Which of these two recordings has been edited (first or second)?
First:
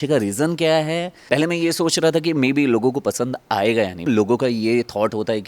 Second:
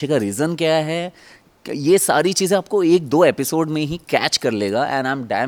first